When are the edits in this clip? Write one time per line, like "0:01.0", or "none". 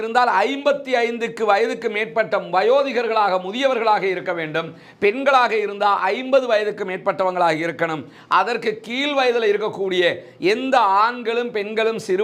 none